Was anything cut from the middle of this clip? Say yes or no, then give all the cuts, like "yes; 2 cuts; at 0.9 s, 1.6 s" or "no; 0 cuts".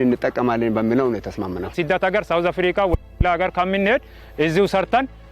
yes; 1 cut; at 1.7 s